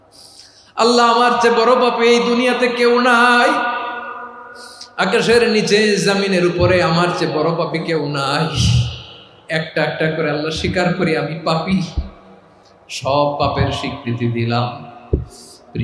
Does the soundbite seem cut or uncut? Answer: uncut